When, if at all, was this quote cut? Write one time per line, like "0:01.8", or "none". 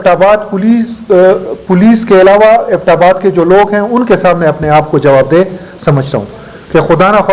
none